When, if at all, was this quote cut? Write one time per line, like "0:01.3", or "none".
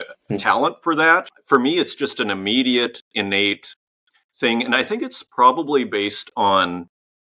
0:01.3